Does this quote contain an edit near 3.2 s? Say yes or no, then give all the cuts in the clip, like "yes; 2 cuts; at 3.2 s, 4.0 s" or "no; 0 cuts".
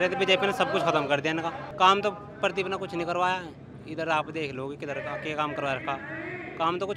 no; 1 cut; at 1.6 s